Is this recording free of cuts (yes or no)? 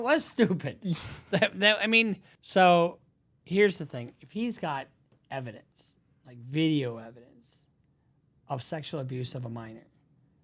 no